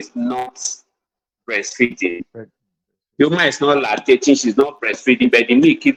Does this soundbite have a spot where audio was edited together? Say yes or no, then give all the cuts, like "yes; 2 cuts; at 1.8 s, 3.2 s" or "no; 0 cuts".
no; 0 cuts